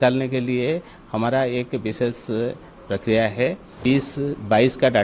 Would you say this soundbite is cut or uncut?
cut